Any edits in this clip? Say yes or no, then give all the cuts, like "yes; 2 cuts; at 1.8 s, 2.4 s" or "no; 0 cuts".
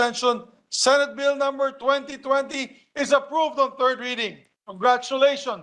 yes; 1 cut; at 4.2 s